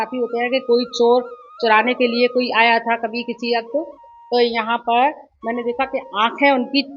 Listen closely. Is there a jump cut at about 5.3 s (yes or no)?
no